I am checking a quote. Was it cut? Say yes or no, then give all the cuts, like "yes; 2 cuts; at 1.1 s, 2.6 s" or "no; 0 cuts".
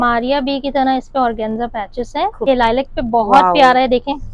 yes; 1 cut; at 2.5 s